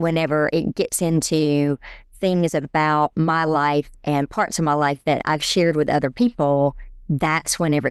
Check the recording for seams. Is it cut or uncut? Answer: cut